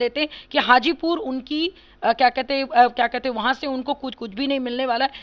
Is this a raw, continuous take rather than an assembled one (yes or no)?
yes